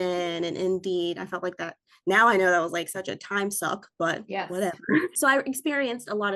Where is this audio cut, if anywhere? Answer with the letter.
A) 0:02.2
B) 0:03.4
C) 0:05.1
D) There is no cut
C